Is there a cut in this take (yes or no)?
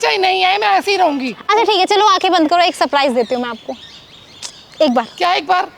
no